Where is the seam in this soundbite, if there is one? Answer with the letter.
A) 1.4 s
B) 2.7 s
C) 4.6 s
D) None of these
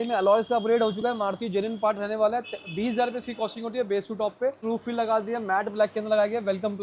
C